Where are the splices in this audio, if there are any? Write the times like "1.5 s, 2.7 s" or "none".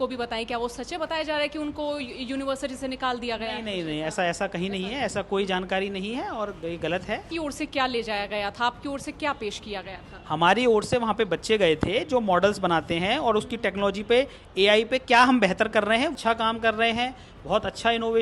7.3 s, 16.1 s